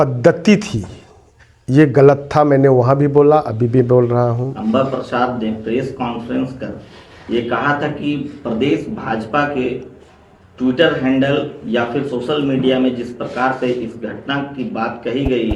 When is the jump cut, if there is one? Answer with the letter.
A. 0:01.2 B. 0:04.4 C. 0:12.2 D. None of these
B